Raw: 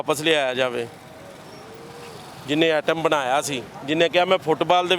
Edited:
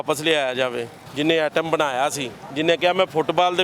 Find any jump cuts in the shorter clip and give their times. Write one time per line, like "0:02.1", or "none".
0:01.0